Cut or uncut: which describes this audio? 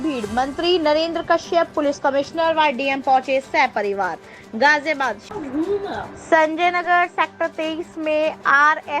cut